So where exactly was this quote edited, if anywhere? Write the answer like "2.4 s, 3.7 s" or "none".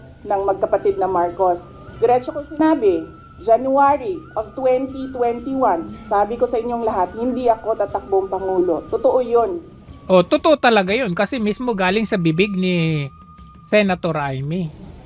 1.9 s